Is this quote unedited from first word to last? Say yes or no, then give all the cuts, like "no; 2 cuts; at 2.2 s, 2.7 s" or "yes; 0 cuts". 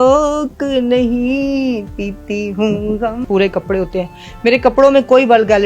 no; 1 cut; at 3.2 s